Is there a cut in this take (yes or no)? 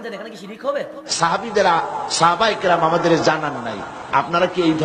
yes